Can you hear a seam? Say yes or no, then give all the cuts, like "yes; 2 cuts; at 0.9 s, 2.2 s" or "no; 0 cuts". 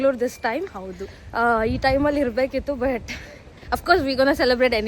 no; 0 cuts